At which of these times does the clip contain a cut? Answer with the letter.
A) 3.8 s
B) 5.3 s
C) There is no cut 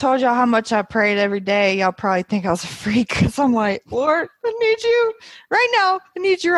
C